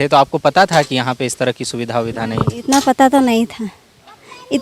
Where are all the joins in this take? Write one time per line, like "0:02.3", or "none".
none